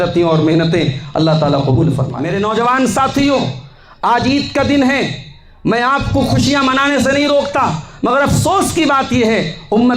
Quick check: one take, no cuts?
no; 1 cut; at 2.2 s

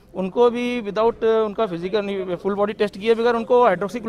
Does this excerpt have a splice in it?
no; 0 cuts

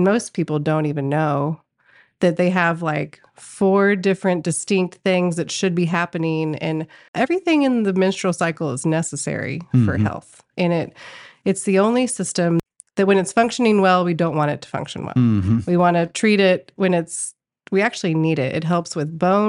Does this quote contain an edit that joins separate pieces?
yes; 2 cuts; at 7.1 s, 12.6 s

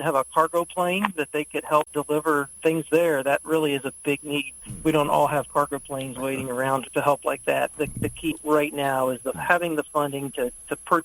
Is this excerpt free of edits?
no; 3 cuts; at 4.5 s, 6.9 s, 7.9 s

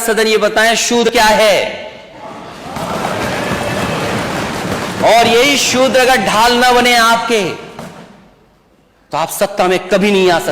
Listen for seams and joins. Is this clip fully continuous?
no; 1 cut; at 1.1 s

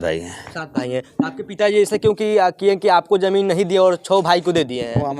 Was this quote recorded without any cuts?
yes; 0 cuts

